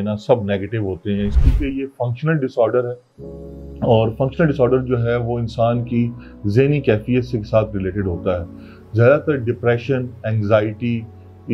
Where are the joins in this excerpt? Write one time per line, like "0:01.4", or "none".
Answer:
0:01.3